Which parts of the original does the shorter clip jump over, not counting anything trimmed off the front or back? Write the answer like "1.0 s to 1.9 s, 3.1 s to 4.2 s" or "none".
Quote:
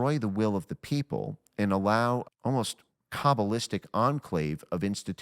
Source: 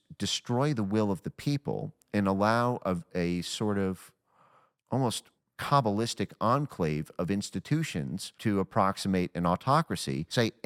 2.8 s to 4.7 s